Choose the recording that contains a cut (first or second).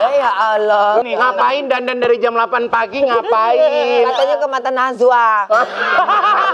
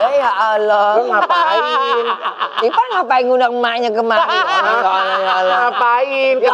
first